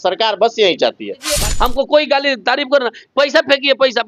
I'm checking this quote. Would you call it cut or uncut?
cut